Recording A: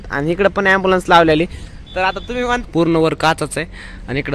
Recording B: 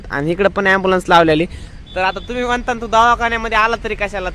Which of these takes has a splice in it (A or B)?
A